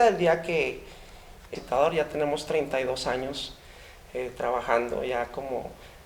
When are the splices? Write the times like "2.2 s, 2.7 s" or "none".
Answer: 1.4 s